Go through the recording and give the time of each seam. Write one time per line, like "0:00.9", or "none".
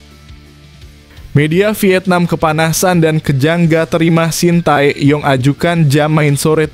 0:01.3